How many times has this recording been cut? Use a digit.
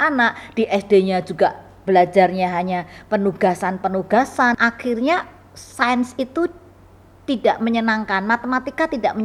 1